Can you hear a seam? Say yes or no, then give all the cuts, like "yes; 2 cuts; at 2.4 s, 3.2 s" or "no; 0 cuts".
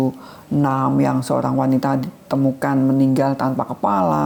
no; 0 cuts